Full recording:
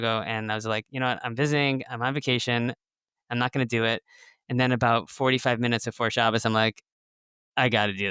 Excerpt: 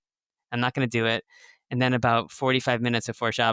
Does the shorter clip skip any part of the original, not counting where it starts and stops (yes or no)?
no